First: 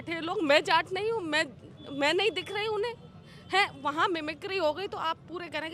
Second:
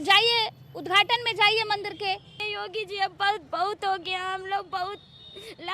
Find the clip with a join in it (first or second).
second